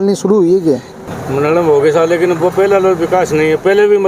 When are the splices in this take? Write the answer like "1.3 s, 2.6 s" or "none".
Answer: 1.0 s